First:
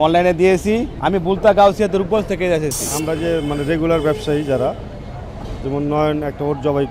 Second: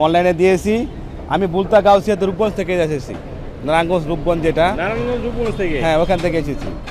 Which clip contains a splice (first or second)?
first